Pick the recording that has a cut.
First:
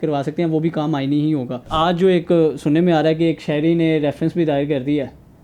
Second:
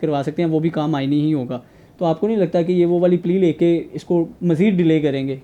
first; 1 cut; at 1.7 s

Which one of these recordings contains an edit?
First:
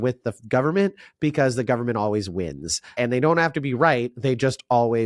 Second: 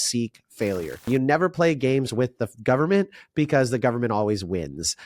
second; 1 cut; at 1.0 s

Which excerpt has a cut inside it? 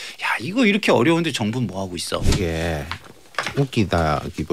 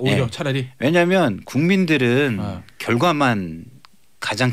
first; 1 cut; at 2.3 s

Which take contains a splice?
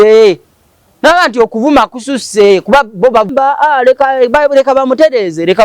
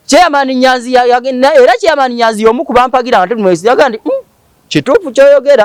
first; 1 cut; at 3.3 s

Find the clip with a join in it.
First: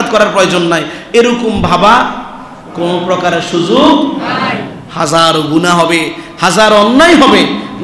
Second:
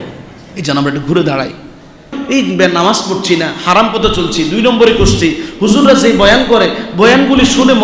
second; 1 cut; at 2.2 s

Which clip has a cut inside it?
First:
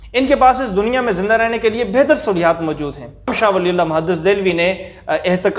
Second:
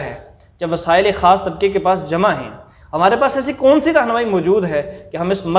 first; 1 cut; at 3.3 s

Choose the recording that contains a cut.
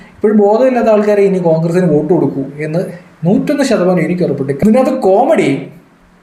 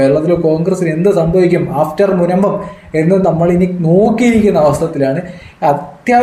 first; 1 cut; at 4.6 s

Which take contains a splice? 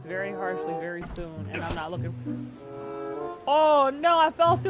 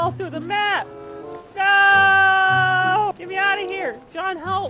second; 1 cut; at 3.1 s

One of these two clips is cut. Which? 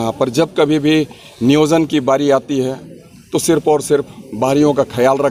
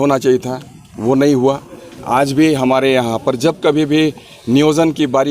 second; 1 cut; at 2.0 s

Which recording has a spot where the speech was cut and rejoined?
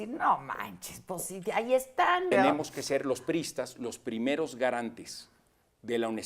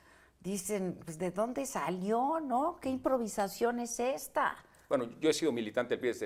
first; 1 cut; at 2.3 s

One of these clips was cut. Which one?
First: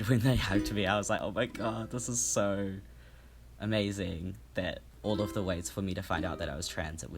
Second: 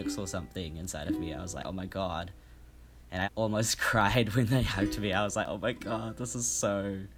first; 1 cut; at 4.9 s

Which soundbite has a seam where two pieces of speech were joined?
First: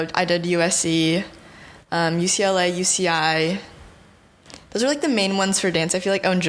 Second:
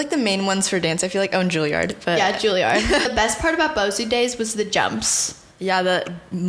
second; 1 cut; at 3.1 s

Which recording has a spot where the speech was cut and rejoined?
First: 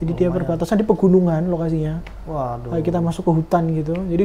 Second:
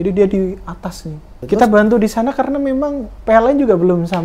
second; 2 cuts; at 1.3 s, 3.1 s

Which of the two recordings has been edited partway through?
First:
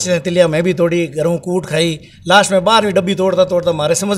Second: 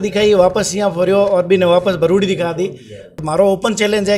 second; 1 cut; at 3.2 s

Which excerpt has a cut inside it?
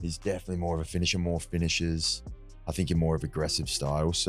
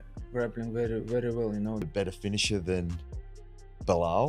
second; 1 cut; at 1.8 s

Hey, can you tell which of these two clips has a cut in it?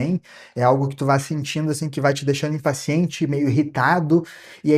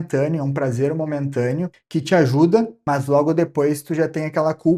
second; 2 cuts; at 1.8 s, 2.8 s

